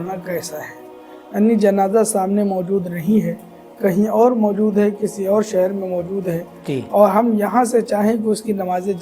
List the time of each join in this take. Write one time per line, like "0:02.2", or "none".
none